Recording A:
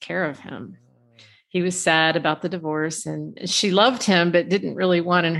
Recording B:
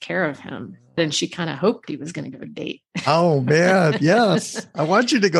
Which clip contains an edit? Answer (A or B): B